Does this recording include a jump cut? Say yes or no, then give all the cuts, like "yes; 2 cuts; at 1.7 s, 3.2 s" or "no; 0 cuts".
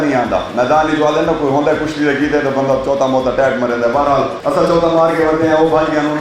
yes; 1 cut; at 4.4 s